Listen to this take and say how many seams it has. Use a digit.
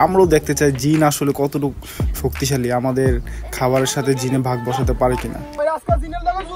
1